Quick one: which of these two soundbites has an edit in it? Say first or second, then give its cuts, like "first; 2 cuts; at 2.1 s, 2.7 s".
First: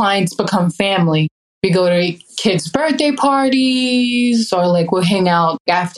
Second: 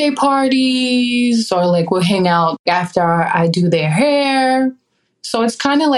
first; 1 cut; at 1.4 s